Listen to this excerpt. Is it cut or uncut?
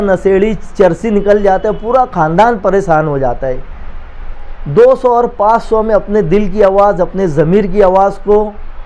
cut